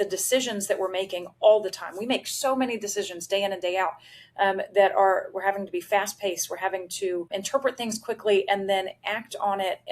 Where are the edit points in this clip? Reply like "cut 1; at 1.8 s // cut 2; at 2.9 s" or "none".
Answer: cut 1; at 7.3 s